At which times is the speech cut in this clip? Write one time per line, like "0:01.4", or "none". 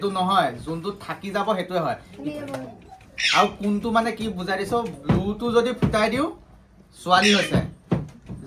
none